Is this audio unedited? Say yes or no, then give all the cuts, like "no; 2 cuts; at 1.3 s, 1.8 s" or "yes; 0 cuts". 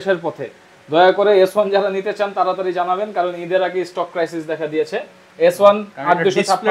yes; 0 cuts